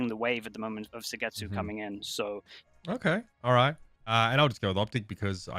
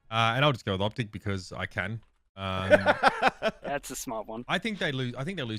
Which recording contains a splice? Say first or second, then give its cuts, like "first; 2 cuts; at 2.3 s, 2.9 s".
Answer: first; 1 cut; at 2.6 s